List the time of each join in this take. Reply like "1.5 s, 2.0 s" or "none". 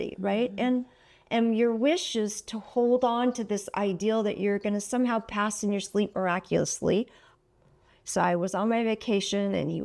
7.2 s